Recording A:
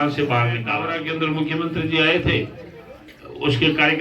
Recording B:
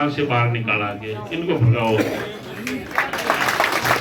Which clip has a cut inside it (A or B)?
A